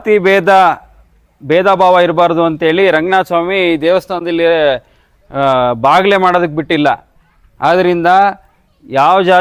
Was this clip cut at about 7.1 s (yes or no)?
no